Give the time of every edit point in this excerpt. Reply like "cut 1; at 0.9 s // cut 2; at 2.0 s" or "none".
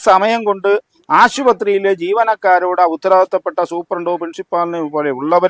none